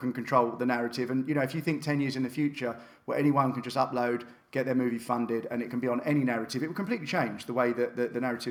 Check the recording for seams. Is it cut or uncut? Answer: uncut